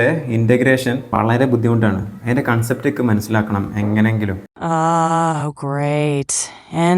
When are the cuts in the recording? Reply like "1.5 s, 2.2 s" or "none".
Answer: 1.1 s, 4.5 s